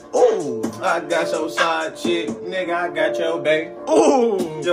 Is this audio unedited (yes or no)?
yes